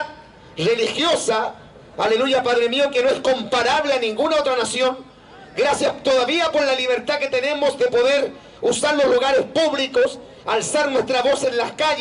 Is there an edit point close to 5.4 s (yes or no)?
no